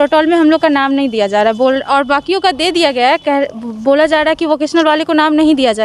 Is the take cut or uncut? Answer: uncut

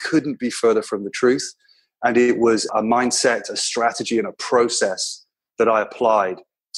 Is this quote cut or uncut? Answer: cut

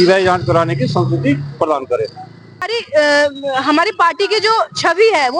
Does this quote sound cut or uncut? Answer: cut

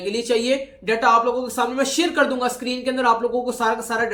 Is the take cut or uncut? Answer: uncut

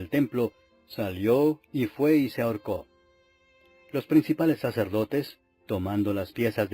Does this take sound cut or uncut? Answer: cut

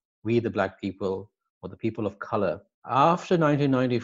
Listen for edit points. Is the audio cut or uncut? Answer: cut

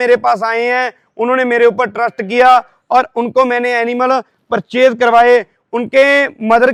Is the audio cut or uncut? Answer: uncut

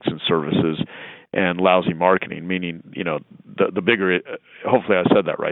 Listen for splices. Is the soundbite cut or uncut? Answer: uncut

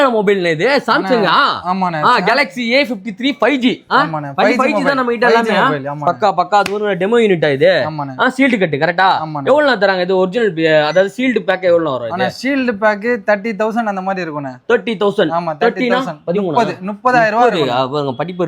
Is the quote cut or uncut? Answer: uncut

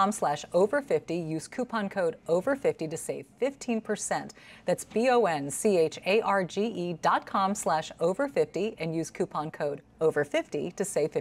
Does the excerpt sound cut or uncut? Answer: uncut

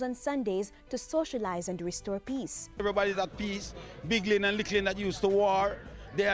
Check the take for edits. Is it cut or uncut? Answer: cut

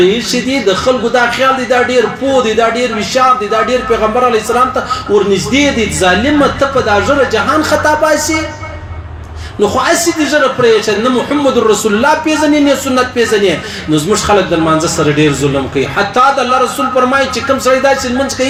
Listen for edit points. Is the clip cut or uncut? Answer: uncut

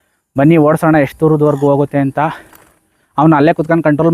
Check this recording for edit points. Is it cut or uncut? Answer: uncut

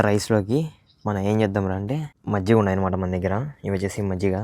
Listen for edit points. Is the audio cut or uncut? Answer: cut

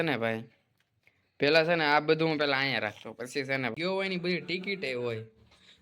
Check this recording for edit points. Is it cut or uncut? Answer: cut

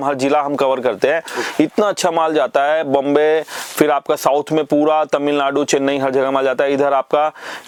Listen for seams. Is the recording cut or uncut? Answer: uncut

